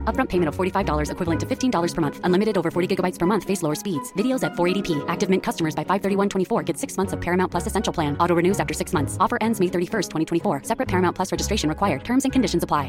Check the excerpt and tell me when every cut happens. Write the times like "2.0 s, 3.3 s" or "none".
none